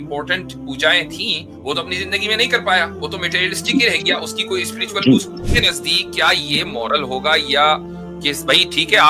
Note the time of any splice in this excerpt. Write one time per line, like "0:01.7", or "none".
0:05.5